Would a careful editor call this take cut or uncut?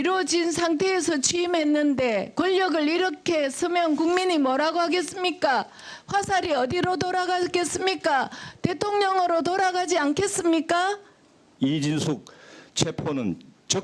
cut